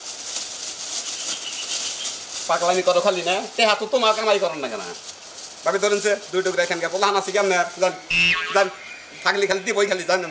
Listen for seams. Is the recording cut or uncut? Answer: uncut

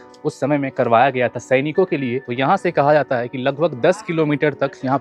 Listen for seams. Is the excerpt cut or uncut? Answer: cut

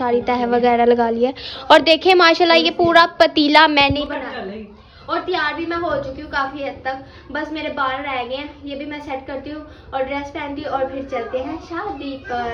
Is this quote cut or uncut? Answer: uncut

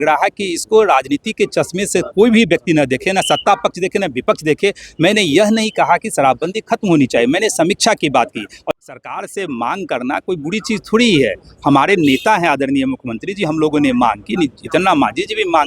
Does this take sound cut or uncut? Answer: cut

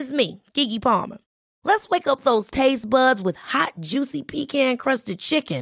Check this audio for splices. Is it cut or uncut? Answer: uncut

